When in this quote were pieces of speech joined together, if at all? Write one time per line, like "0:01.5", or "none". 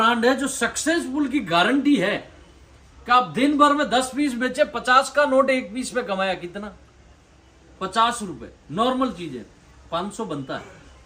none